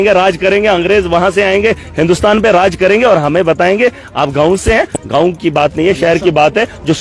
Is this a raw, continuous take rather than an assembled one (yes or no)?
yes